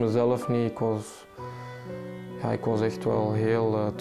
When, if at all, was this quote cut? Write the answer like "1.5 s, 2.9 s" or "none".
none